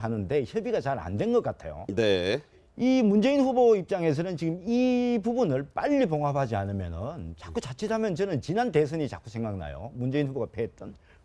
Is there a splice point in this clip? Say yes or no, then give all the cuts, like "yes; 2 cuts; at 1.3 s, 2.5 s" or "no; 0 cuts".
yes; 1 cut; at 2.5 s